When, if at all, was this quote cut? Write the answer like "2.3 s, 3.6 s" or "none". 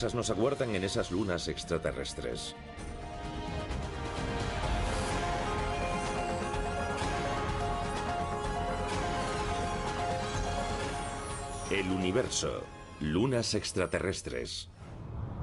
14.0 s